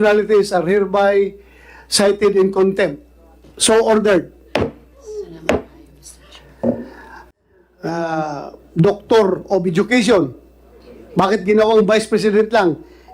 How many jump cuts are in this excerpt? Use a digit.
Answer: 1